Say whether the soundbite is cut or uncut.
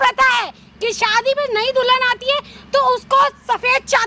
uncut